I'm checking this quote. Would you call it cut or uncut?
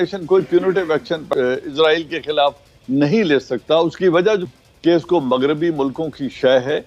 cut